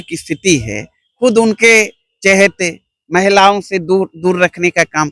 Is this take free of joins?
yes; 0 cuts

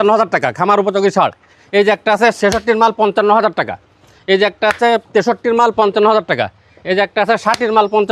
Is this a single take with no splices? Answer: yes; 0 cuts

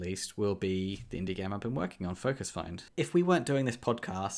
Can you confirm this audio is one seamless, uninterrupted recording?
no; 1 cut; at 2.8 s

